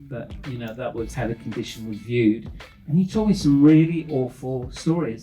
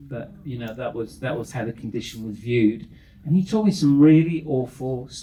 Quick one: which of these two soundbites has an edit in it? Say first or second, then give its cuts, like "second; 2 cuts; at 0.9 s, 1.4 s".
first; 1 cut; at 1.1 s